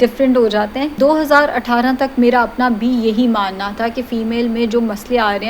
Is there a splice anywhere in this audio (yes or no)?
yes